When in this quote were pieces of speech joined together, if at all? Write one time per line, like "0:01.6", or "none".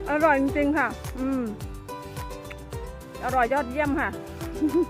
none